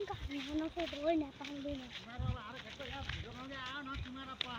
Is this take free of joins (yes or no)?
yes